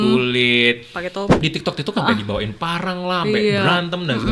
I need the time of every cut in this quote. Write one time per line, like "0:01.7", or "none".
0:01.4